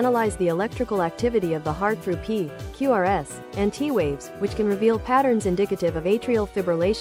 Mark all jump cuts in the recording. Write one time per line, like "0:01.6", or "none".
none